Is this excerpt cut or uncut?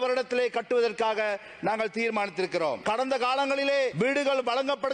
cut